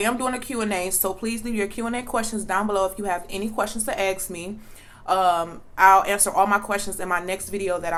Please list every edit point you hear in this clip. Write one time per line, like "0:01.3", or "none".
none